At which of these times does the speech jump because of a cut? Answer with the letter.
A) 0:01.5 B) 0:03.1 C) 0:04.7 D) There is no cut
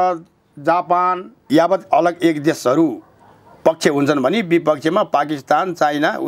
A